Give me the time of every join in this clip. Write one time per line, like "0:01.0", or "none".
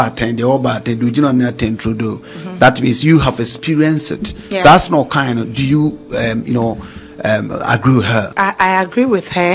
0:08.3